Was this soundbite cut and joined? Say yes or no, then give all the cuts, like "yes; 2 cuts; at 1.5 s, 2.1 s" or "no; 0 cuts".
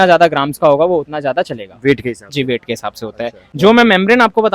yes; 1 cut; at 3.5 s